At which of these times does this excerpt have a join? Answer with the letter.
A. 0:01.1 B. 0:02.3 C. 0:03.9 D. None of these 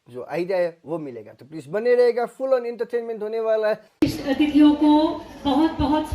C